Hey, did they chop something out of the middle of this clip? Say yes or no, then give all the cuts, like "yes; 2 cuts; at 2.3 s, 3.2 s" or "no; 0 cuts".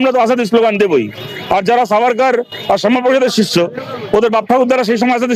no; 0 cuts